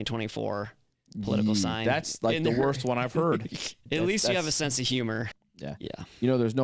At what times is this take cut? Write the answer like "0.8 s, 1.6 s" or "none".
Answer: 3.8 s, 5.4 s